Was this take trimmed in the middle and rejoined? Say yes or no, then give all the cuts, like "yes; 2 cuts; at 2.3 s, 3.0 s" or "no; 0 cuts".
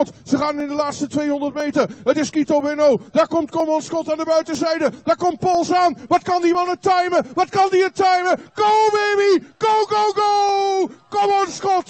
no; 0 cuts